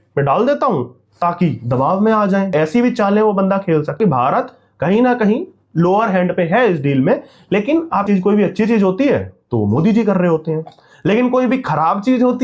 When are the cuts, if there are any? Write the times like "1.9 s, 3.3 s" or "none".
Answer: 2.5 s, 4.0 s, 8.0 s